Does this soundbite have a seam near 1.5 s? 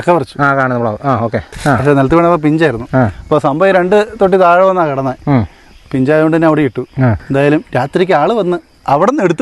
yes; 2 cuts; at 1.5 s, 7.2 s

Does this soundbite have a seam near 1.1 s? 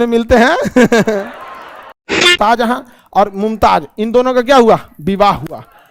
no; 1 cut; at 2.3 s

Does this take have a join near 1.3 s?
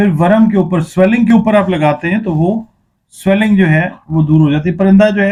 no; 0 cuts

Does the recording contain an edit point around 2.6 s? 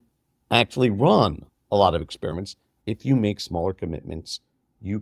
yes; 1 cut; at 2.6 s

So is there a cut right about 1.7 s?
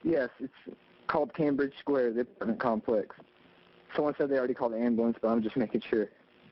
no; 0 cuts

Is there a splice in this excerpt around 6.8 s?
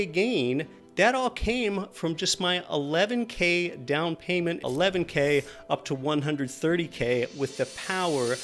no; 1 cut; at 4.6 s

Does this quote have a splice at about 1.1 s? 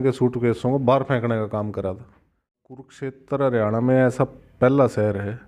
no; 1 cut; at 2.9 s

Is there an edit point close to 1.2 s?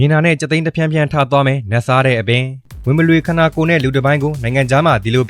no; 1 cut; at 2.6 s

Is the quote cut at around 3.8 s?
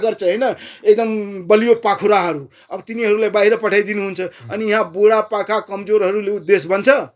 no; 0 cuts

